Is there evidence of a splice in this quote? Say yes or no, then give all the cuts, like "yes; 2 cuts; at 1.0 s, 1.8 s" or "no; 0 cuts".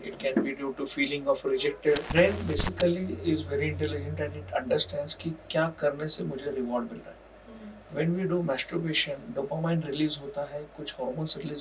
yes; 1 cut; at 2.1 s